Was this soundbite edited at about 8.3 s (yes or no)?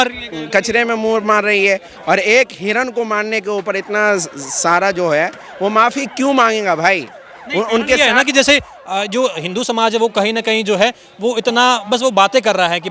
no